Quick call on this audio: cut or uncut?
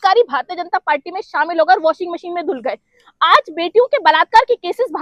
uncut